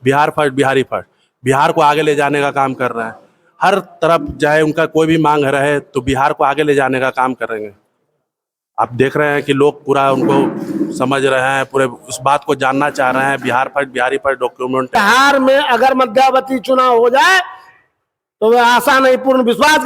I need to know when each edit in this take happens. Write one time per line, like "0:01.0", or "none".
0:15.0